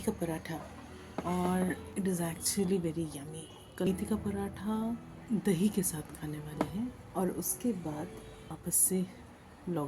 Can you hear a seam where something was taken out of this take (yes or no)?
yes